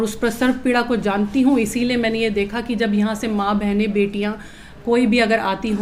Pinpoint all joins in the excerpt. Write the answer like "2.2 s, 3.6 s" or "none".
none